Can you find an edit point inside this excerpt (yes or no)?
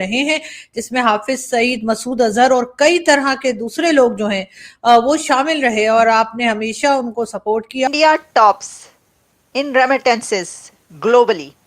yes